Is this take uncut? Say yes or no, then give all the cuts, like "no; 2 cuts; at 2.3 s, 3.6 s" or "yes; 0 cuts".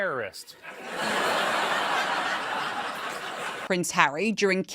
no; 1 cut; at 3.5 s